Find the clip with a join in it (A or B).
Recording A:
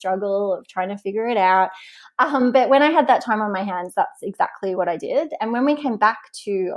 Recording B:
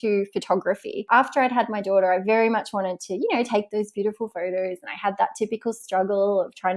B